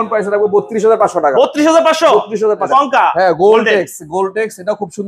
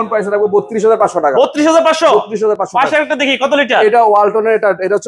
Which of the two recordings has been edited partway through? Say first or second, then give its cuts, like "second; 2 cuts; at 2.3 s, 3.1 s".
first; 1 cut; at 2.6 s